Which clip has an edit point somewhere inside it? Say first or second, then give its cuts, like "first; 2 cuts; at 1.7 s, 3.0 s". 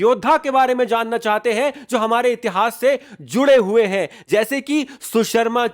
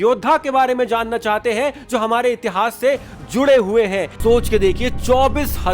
second; 1 cut; at 4.1 s